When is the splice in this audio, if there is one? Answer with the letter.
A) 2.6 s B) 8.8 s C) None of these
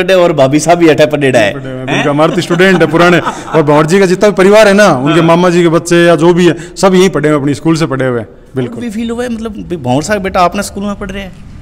B